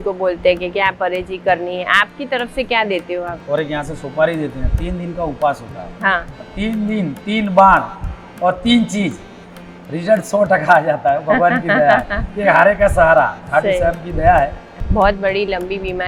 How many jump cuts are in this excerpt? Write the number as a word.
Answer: three